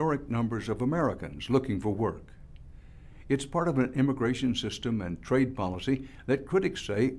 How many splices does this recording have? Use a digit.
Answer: 1